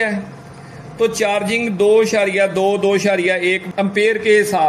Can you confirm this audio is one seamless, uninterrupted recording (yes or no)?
no